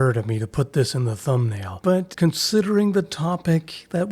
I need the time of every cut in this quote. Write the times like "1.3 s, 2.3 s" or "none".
2.0 s